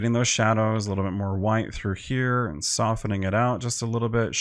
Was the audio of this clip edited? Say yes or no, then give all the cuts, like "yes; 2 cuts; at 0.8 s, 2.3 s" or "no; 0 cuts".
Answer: no; 0 cuts